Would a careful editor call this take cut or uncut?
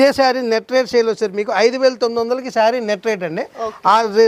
uncut